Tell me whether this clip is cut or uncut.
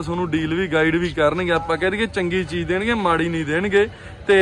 uncut